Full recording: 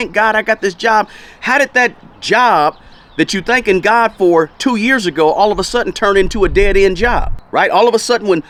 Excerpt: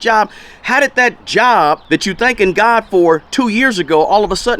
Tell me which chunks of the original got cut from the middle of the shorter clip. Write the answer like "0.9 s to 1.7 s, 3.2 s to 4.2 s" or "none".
2.0 s to 2.2 s, 2.8 s to 3.1 s